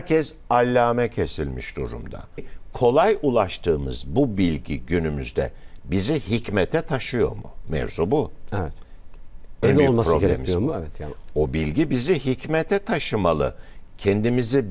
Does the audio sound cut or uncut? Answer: cut